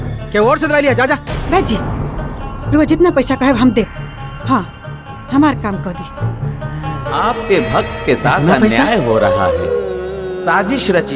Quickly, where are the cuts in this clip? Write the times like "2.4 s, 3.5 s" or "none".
7.1 s